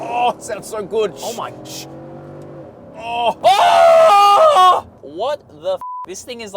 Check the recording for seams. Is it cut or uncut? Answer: cut